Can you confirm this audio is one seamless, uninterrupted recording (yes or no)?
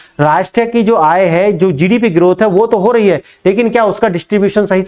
yes